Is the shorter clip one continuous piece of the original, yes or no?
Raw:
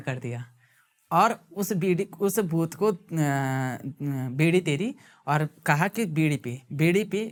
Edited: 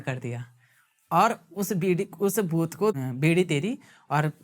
no